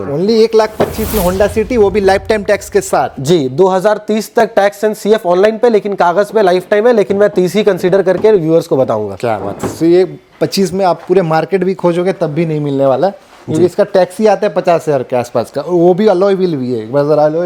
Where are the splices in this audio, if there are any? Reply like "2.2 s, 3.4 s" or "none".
none